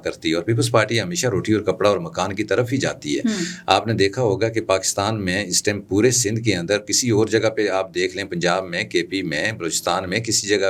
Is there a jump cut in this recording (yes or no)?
no